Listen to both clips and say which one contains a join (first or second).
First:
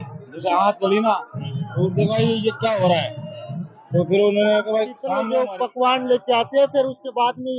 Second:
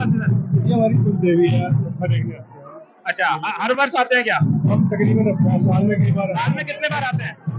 first